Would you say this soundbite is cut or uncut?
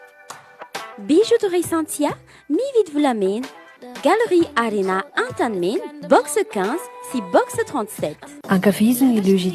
uncut